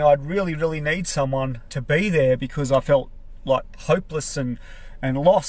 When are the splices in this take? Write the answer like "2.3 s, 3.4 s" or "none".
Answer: 1.7 s